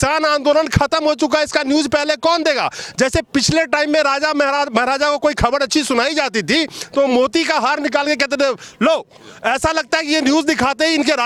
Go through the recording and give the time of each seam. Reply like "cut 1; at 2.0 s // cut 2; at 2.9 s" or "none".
none